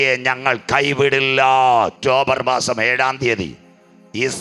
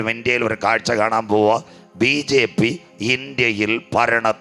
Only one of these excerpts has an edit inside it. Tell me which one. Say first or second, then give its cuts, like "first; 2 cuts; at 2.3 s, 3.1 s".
first; 1 cut; at 1.9 s